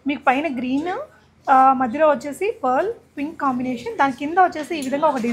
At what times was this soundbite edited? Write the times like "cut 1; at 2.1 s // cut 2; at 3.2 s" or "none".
none